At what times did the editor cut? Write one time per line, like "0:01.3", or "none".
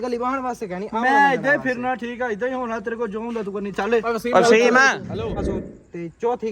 0:05.4